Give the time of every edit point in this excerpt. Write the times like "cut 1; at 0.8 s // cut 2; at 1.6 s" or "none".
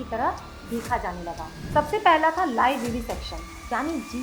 cut 1; at 1.5 s